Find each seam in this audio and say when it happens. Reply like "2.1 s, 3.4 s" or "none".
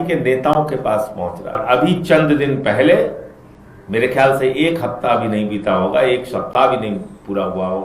1.6 s